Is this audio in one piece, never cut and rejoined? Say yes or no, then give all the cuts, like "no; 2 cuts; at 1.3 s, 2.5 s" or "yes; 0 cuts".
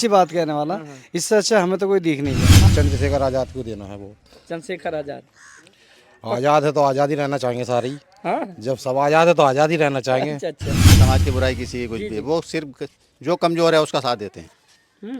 no; 2 cuts; at 2.5 s, 11.0 s